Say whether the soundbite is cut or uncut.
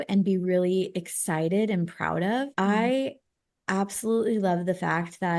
cut